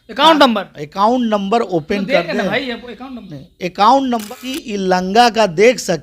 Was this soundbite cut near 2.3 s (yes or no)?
no